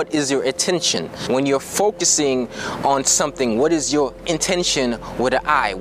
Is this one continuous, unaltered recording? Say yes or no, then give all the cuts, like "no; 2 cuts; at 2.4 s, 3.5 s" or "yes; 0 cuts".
no; 1 cut; at 1.2 s